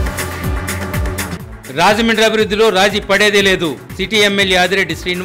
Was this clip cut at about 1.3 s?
yes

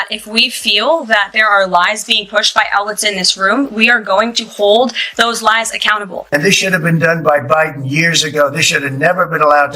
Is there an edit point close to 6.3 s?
yes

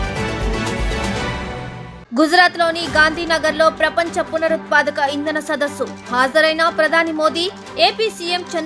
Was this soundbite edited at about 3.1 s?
no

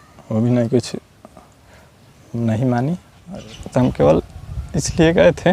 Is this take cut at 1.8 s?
no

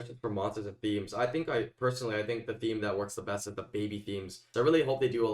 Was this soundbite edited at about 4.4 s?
yes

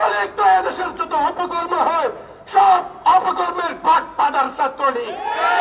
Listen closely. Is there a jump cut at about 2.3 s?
no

